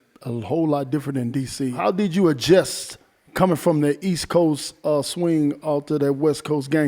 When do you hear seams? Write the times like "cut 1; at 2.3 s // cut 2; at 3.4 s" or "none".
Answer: cut 1; at 1.8 s